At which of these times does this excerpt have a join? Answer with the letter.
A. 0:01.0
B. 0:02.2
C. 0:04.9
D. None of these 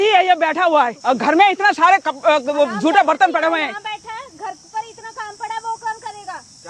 A